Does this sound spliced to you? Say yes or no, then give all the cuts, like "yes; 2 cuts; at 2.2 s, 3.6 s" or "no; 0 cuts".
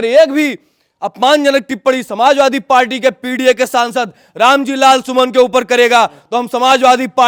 no; 0 cuts